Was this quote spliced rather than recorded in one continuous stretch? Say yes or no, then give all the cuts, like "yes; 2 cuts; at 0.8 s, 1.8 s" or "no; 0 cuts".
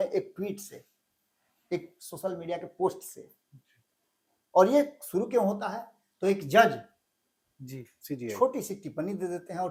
no; 0 cuts